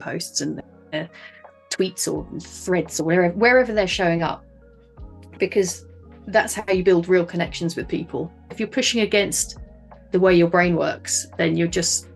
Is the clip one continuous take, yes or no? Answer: no